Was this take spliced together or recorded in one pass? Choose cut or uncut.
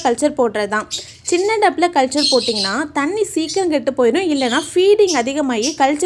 uncut